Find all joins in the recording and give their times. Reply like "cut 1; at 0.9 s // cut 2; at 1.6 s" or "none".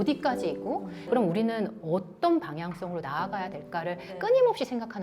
cut 1; at 1.0 s